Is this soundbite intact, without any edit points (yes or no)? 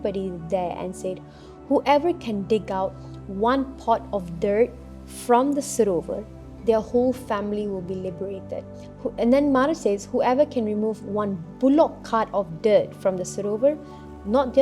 no